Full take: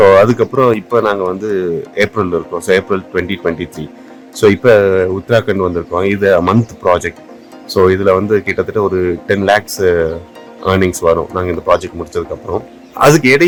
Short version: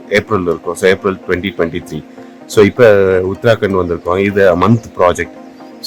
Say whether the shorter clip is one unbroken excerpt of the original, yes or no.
yes